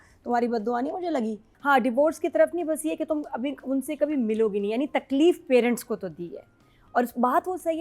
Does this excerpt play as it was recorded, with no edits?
no; 1 cut; at 1.5 s

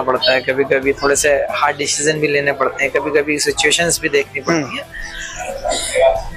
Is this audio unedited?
yes; 0 cuts

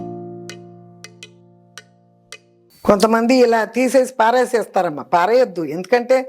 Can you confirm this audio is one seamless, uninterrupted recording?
no; 1 cut; at 2.8 s

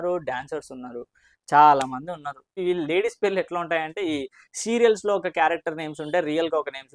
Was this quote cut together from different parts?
yes; 1 cut; at 2.5 s

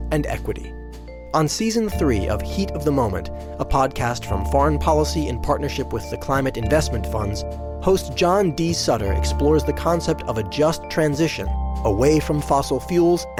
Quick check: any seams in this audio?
no; 0 cuts

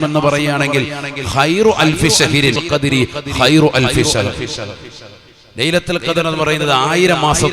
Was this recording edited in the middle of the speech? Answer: yes; 1 cut; at 2.6 s

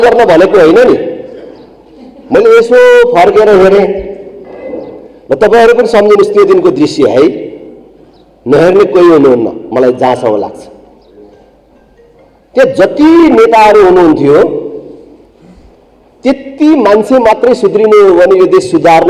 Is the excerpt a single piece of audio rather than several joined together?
yes; 0 cuts

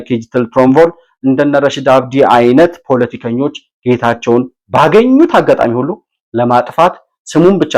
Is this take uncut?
yes; 0 cuts

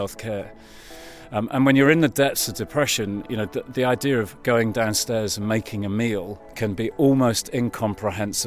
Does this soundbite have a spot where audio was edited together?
yes; 1 cut; at 6.4 s

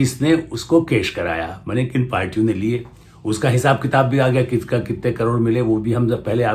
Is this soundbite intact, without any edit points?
yes; 0 cuts

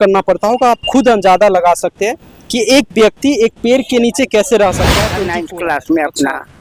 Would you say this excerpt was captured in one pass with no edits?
no; 1 cut; at 5.1 s

